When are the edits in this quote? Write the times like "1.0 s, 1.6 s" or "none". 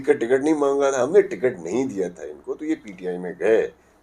none